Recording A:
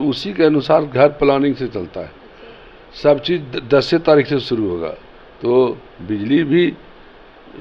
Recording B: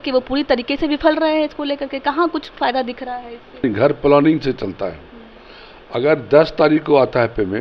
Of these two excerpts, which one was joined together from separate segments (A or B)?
B